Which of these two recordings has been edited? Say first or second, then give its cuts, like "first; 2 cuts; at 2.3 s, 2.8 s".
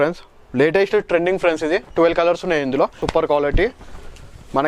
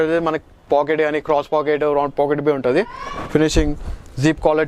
first; 1 cut; at 3.0 s